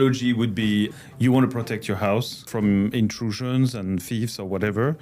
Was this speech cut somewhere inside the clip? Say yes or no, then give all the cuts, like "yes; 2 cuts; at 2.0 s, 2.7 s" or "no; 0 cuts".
yes; 2 cuts; at 0.9 s, 2.5 s